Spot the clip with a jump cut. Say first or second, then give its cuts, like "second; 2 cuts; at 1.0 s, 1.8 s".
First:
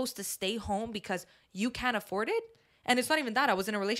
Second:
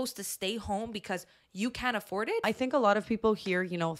second; 1 cut; at 2.4 s